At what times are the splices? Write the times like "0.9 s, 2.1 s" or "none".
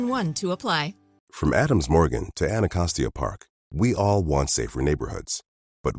1.0 s